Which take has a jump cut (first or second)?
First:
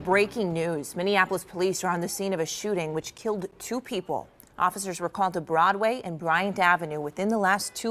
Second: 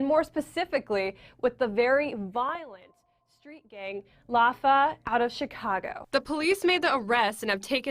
second